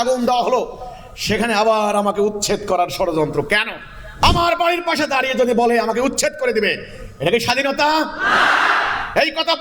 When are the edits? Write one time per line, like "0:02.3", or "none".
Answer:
0:04.2